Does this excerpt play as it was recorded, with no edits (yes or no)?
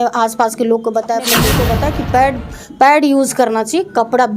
no